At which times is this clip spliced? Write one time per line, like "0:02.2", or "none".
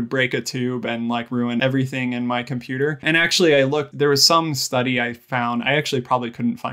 0:01.6
0:03.0
0:03.9